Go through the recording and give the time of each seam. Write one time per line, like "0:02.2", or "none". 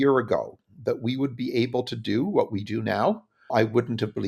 0:03.3